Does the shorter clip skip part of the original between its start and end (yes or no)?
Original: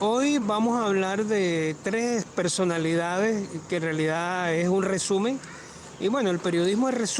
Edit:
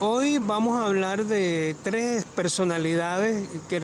no